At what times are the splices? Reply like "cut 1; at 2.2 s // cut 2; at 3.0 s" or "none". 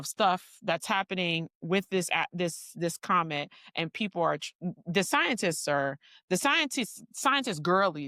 none